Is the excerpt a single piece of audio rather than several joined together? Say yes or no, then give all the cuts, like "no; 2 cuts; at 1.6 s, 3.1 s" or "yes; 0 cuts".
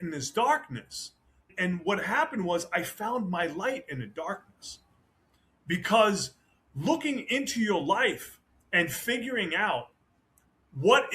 no; 1 cut; at 1.4 s